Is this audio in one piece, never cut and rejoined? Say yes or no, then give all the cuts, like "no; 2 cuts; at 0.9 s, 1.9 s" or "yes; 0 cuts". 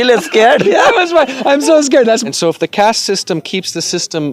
no; 1 cut; at 2.2 s